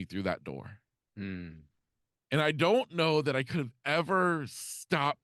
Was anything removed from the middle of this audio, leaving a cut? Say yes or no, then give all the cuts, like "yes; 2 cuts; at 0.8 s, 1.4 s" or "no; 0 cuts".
no; 0 cuts